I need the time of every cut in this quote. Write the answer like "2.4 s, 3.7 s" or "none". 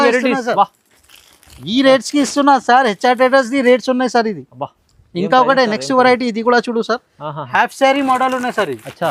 none